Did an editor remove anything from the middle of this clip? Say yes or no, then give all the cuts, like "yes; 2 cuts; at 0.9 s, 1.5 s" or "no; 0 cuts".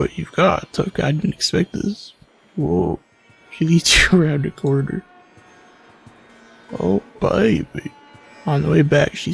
no; 0 cuts